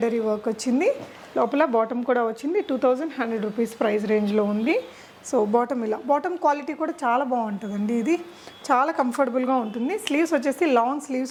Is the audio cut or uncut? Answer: uncut